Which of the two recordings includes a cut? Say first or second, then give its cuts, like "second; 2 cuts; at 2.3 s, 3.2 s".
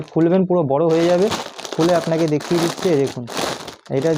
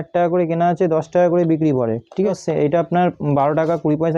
second; 1 cut; at 2.3 s